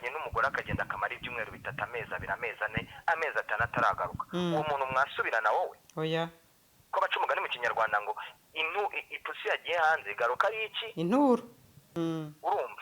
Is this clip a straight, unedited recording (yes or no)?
no